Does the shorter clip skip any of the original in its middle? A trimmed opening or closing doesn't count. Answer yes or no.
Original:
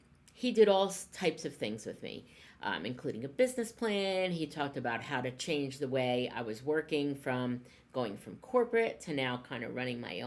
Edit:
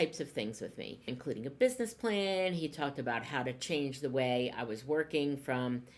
yes